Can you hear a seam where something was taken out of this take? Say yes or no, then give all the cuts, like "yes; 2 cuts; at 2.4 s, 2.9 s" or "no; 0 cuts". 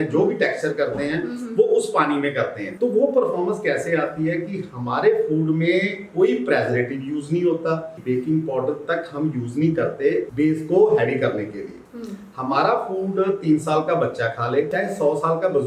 yes; 4 cuts; at 2.6 s, 7.9 s, 10.3 s, 14.7 s